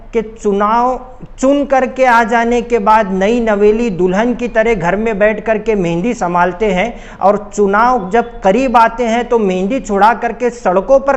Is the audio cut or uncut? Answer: uncut